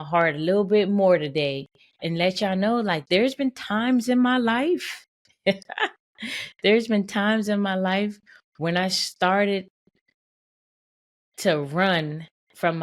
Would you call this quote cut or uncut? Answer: cut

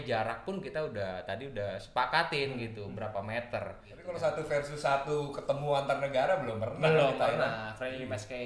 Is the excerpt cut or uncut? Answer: cut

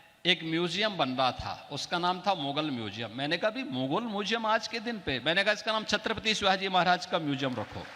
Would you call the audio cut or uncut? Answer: uncut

